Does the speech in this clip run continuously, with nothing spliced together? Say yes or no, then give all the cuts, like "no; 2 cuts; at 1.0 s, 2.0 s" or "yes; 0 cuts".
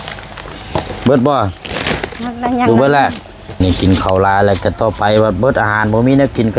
no; 1 cut; at 3.6 s